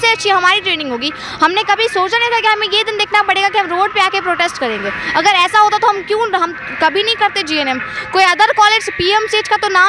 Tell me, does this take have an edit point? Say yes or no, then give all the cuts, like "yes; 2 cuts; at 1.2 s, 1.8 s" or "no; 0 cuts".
no; 0 cuts